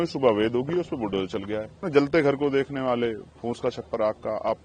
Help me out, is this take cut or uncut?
cut